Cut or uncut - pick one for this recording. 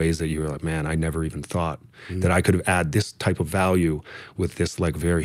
uncut